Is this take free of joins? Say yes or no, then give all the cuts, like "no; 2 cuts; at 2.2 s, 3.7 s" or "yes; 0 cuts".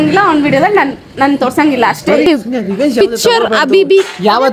no; 1 cut; at 2.2 s